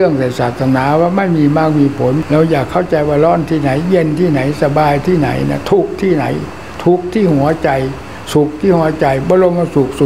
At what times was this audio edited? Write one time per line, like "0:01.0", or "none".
0:02.2